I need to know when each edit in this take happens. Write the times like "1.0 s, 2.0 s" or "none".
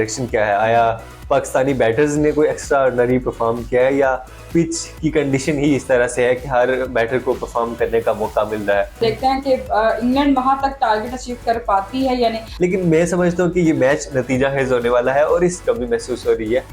9.0 s, 12.5 s, 15.6 s